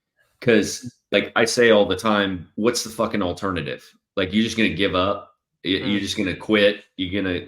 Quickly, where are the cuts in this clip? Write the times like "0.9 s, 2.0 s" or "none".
1.0 s, 2.4 s